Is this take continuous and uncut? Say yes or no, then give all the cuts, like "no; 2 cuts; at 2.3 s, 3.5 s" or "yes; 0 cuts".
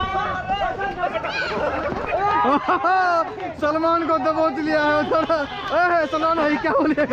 yes; 0 cuts